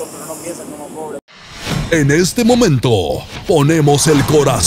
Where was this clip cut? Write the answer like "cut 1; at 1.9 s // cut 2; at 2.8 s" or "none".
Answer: cut 1; at 1.2 s